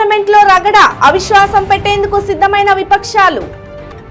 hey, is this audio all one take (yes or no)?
yes